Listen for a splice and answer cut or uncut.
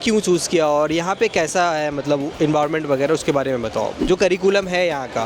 cut